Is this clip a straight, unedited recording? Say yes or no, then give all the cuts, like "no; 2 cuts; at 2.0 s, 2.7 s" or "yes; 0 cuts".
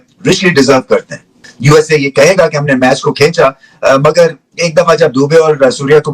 no; 1 cut; at 1.5 s